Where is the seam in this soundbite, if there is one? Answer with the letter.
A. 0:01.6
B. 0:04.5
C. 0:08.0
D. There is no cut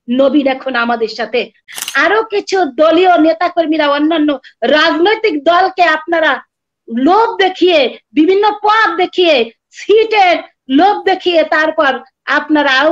A